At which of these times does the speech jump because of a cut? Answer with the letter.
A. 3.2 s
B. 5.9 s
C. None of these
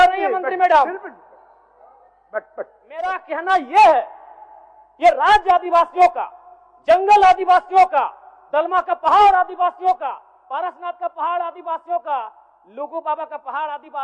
A